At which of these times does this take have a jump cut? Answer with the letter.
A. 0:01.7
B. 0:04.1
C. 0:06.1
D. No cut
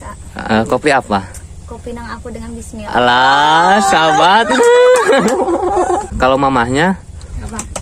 C